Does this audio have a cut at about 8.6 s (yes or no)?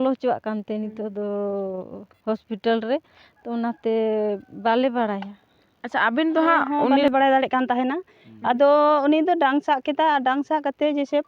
no